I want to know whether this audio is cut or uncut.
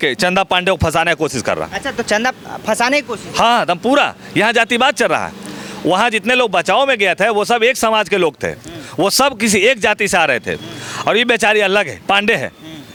uncut